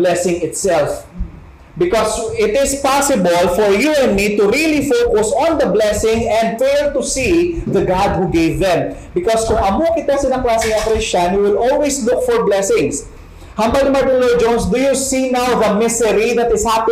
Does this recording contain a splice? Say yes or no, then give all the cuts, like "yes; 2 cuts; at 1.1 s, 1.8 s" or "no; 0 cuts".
yes; 1 cut; at 6.5 s